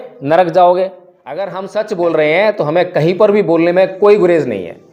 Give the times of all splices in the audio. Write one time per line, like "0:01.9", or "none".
0:01.6